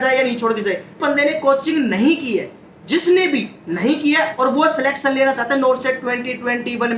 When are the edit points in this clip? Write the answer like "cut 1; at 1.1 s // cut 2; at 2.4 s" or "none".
cut 1; at 1.0 s